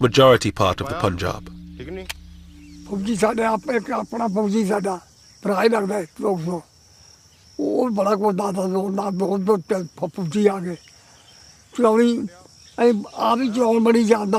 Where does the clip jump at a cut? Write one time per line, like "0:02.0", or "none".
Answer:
0:09.6